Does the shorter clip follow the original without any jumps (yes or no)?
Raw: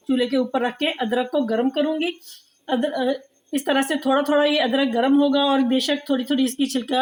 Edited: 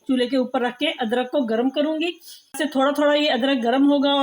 no